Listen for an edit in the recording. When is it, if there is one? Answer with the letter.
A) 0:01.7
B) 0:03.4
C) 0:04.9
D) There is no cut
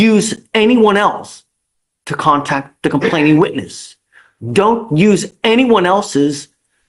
D